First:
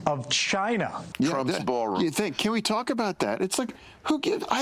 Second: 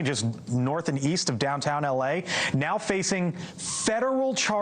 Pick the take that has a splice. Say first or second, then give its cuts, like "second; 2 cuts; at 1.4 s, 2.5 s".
first; 1 cut; at 1.0 s